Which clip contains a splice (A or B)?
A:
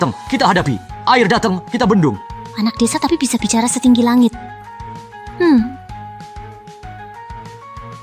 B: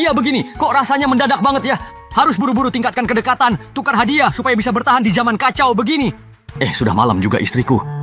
A